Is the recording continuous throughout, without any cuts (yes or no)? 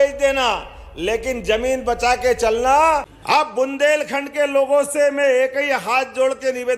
no